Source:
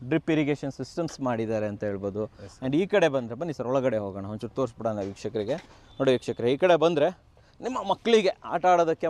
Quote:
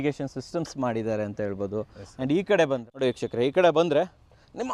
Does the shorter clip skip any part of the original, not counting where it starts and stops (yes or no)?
yes